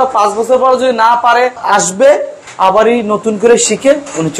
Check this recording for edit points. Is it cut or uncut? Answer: uncut